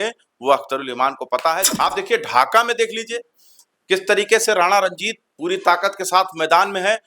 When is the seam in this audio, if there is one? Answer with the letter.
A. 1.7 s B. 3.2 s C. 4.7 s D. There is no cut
A